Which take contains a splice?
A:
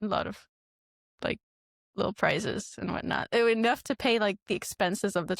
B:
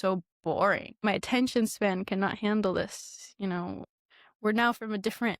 B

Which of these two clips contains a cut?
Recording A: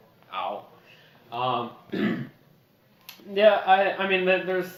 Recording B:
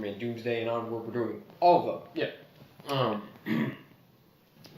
B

